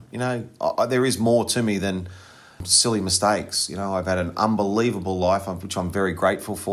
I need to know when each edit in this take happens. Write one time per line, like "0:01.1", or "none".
0:02.6